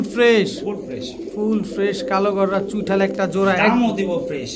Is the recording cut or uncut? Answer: uncut